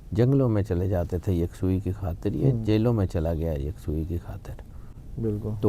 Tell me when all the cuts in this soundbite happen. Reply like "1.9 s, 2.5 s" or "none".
none